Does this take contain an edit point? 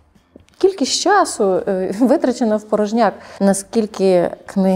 yes; 1 cut; at 3.3 s

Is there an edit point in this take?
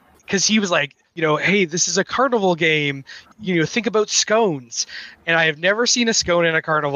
yes; 1 cut; at 2.1 s

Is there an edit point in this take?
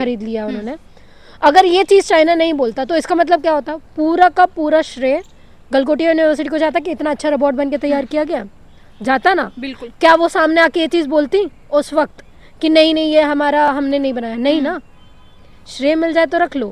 no; 0 cuts

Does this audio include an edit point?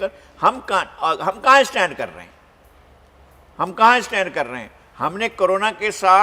no; 0 cuts

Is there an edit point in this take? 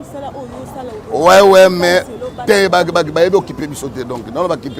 no; 0 cuts

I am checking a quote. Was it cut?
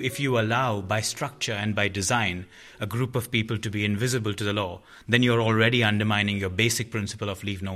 no; 0 cuts

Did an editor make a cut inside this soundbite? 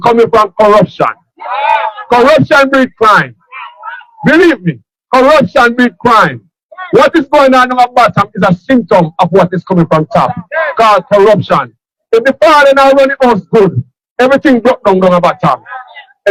no; 0 cuts

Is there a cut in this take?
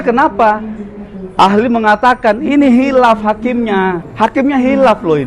yes; 1 cut; at 4.1 s

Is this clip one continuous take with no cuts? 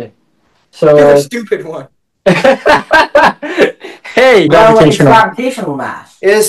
no; 1 cut; at 4.5 s

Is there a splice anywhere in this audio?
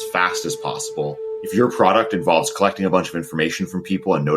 yes; 1 cut; at 1.3 s

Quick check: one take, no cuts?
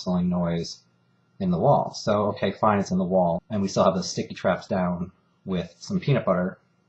yes; 0 cuts

